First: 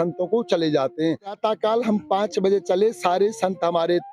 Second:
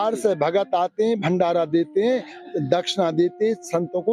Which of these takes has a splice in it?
first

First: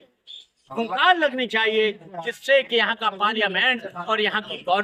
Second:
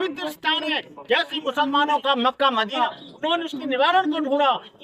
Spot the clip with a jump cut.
second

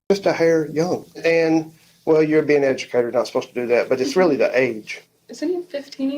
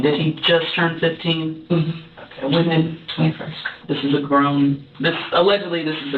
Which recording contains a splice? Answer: first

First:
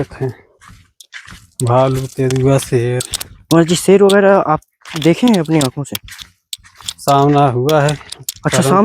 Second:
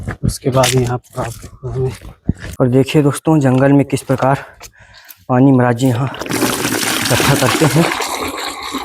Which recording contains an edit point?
second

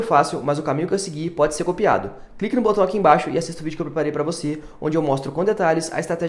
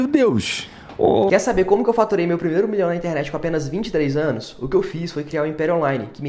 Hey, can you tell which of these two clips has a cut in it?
second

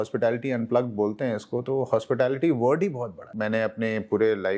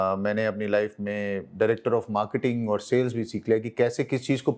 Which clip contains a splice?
first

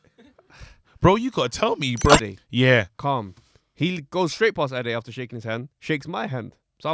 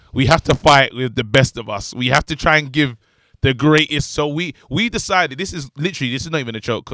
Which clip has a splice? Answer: first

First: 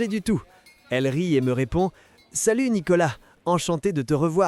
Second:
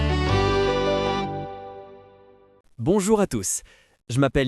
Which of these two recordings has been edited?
second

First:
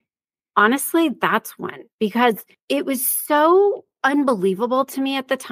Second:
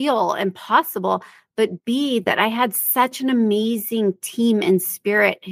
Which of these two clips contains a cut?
first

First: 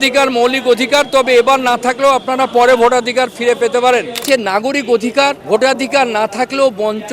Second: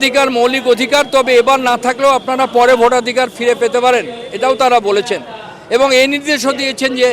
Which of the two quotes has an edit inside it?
first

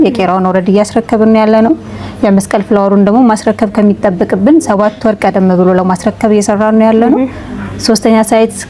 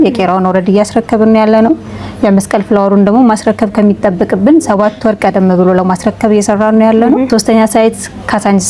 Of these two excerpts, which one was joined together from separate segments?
second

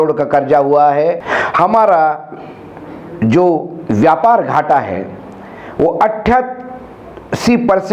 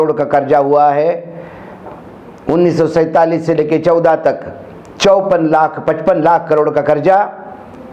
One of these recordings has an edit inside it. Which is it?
first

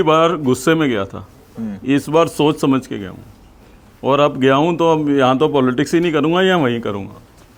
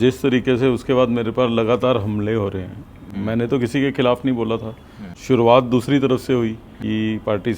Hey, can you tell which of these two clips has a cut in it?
second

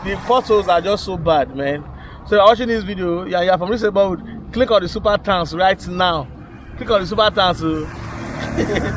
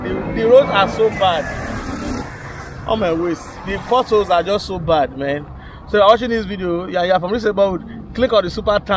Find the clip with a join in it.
second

